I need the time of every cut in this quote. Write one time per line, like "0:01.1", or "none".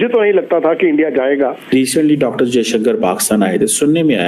0:01.7